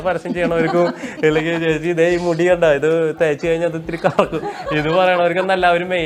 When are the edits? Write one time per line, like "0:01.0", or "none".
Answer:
none